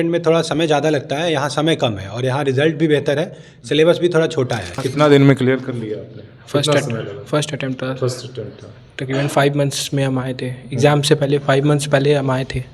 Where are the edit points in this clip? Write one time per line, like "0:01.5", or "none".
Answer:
0:04.8